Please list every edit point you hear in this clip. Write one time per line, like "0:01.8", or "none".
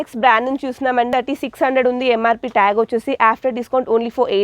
0:01.1